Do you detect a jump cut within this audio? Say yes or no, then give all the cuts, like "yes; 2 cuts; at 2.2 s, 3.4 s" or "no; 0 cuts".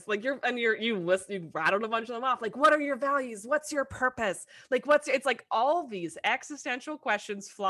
no; 0 cuts